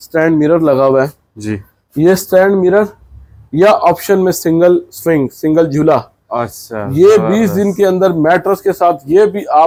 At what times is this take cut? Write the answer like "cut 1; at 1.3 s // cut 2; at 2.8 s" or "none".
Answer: none